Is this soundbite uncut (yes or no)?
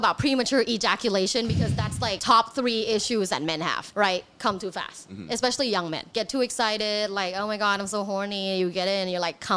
no